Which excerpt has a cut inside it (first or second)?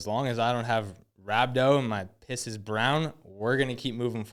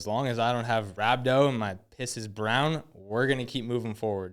second